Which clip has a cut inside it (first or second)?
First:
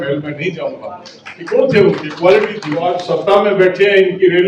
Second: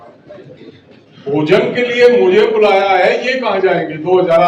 first